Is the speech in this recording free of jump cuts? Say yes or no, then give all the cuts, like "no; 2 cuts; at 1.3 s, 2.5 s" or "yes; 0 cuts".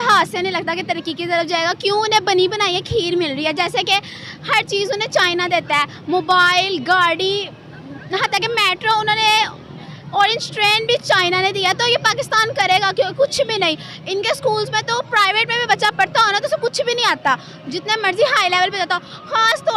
yes; 0 cuts